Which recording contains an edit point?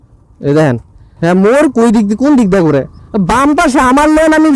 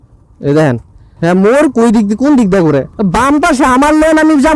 second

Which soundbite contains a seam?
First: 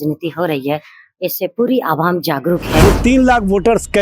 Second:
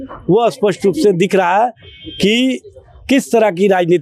first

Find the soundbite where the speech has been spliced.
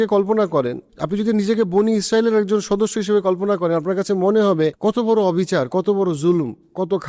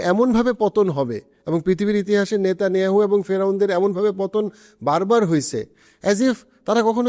first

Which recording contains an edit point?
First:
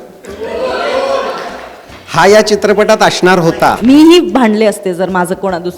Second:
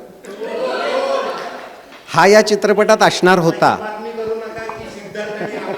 first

